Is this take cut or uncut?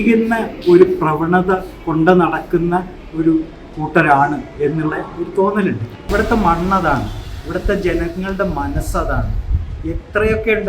cut